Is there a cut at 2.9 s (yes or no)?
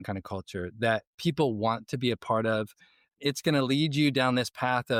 no